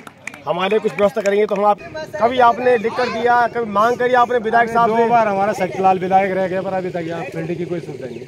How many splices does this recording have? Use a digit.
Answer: 1